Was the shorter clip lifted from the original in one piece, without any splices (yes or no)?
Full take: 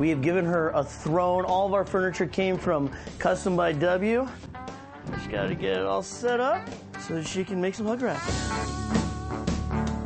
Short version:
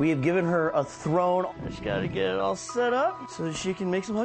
no